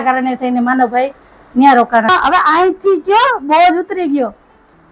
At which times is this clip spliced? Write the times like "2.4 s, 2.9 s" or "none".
2.1 s